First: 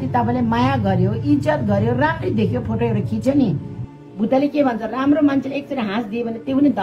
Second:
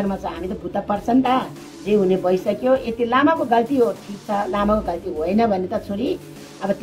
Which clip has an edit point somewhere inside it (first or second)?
second